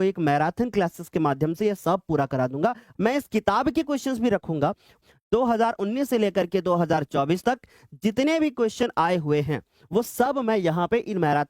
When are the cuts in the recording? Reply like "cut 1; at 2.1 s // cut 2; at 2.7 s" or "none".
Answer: cut 1; at 2.8 s // cut 2; at 4.9 s